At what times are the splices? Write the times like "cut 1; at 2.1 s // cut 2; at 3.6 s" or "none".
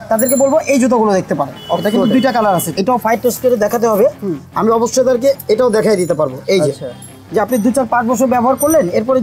cut 1; at 2.8 s // cut 2; at 7.2 s

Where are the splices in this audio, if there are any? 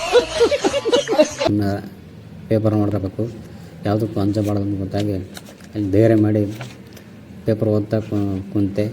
cut 1; at 2.9 s

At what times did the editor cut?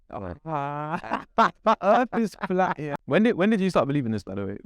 cut 1; at 2.9 s

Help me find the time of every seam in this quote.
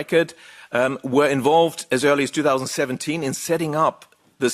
none

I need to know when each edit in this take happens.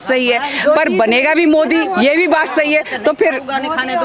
none

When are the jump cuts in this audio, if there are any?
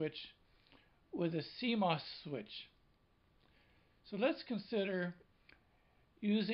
cut 1; at 5.5 s

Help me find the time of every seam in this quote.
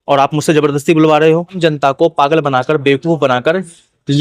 cut 1; at 1.6 s

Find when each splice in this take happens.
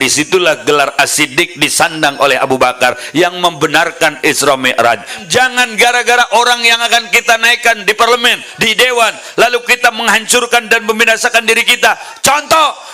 cut 1; at 5.2 s

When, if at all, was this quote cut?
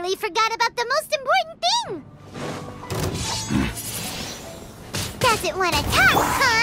cut 1; at 2.2 s

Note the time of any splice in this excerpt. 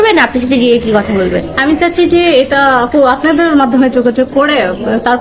none

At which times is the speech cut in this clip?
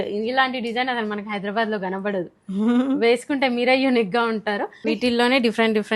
cut 1; at 4.8 s

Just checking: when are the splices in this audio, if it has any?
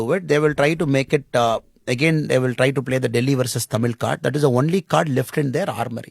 none

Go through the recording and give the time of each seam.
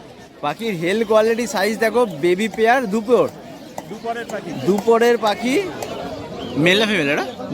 cut 1; at 5.8 s

